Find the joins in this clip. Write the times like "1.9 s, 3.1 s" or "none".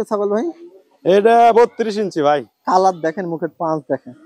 none